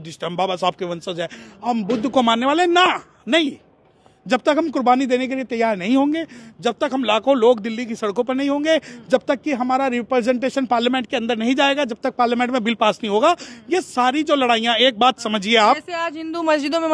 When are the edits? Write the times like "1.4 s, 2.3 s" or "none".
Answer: none